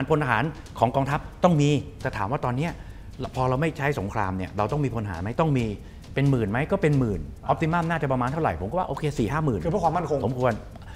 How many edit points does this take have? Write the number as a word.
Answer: one